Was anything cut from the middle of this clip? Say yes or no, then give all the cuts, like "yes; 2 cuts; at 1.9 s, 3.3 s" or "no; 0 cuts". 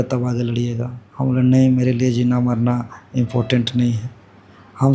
no; 0 cuts